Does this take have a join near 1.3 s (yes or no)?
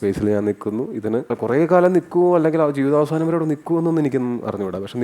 yes